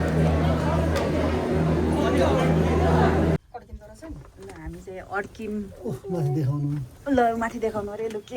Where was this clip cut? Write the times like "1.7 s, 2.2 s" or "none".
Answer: none

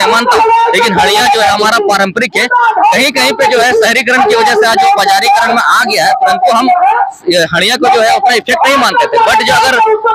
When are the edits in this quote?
none

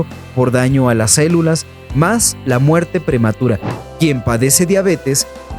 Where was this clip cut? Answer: 3.7 s

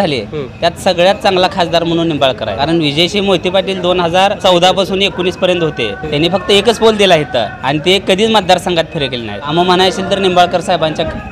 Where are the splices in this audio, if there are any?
2.5 s, 4.4 s, 6.0 s, 7.6 s, 9.5 s

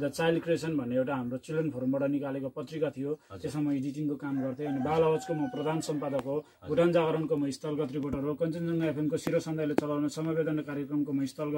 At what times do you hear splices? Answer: none

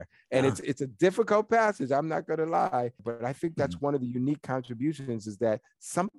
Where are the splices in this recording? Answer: 3.0 s

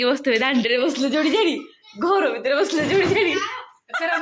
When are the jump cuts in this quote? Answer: none

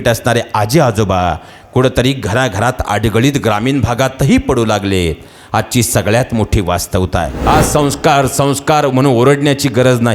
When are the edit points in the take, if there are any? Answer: 7.3 s

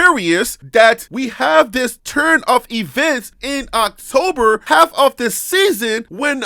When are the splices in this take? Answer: none

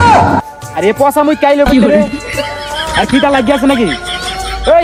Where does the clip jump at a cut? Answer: none

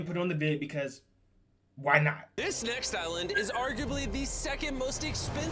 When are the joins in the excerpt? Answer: 2.3 s

